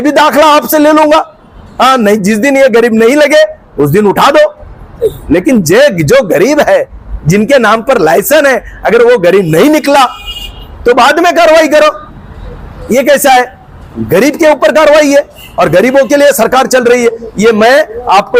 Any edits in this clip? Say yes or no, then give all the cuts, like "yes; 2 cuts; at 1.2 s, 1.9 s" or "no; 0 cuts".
no; 0 cuts